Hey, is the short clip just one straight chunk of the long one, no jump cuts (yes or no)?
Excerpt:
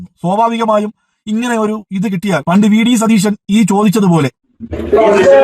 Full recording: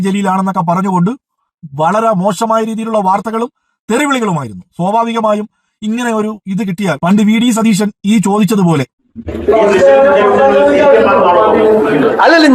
yes